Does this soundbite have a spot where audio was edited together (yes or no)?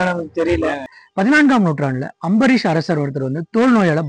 yes